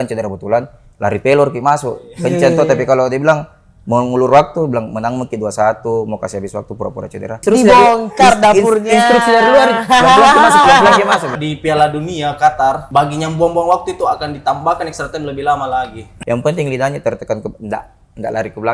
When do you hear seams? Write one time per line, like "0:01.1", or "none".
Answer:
0:07.4
0:11.4
0:12.8
0:16.1